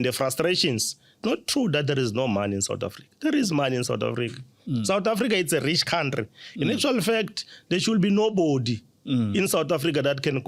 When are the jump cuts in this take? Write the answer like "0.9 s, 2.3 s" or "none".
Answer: 1.2 s